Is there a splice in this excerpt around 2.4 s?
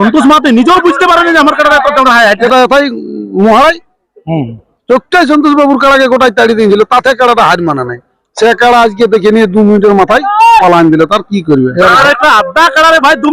yes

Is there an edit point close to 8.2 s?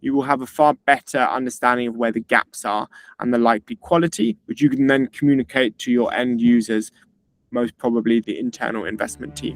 yes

